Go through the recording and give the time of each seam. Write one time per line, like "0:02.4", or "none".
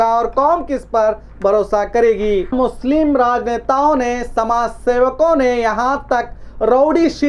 0:02.5